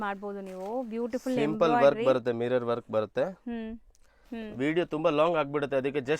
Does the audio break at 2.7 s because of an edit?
no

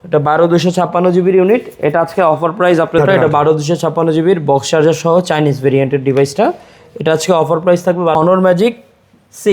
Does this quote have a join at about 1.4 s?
no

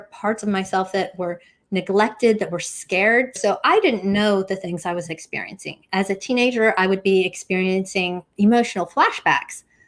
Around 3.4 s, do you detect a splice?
yes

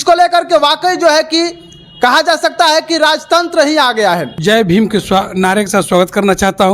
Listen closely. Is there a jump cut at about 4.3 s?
yes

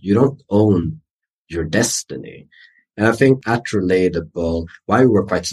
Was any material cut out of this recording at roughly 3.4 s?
yes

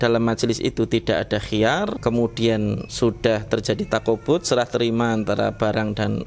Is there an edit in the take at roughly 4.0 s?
no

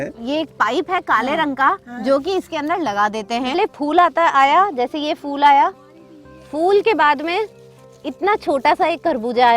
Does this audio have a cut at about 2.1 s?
no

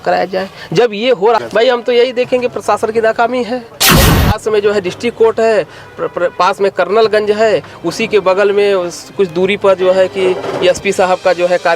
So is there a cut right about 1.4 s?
yes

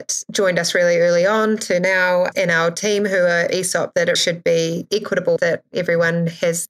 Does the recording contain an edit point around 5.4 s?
yes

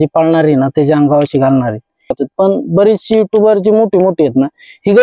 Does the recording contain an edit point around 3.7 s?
no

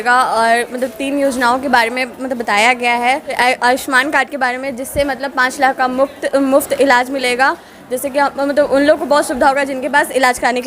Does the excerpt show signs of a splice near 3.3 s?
yes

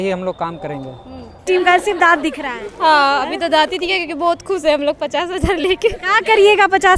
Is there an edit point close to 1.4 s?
yes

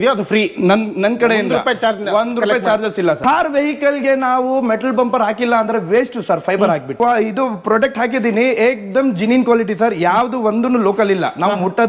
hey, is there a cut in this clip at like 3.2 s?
yes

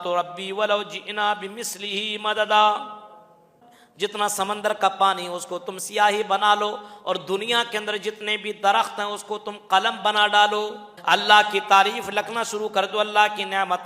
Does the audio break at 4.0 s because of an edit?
yes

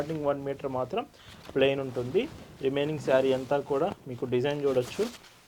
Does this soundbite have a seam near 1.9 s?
no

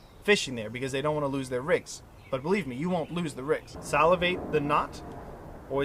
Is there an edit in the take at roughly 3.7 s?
yes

